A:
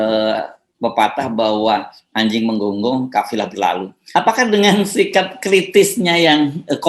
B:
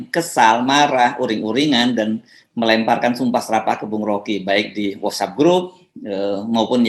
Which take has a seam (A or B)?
A